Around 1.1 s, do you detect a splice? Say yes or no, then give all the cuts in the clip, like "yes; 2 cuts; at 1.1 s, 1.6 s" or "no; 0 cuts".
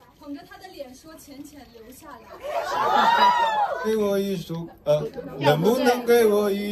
no; 1 cut; at 3.9 s